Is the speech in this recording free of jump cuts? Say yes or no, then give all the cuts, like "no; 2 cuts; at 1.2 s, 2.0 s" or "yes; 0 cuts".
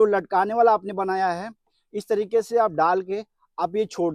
yes; 0 cuts